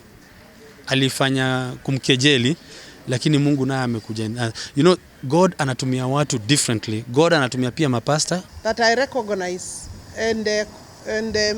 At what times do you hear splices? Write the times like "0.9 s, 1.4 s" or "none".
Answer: 8.5 s